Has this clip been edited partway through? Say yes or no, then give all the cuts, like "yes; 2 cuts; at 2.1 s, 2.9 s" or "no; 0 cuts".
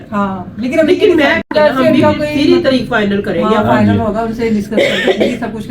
yes; 1 cut; at 1.5 s